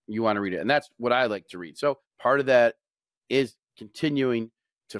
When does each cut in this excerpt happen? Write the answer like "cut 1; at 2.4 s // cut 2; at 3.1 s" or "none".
cut 1; at 2.1 s